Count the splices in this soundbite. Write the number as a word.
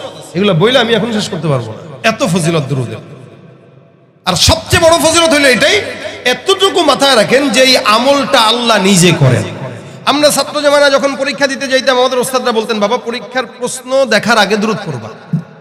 zero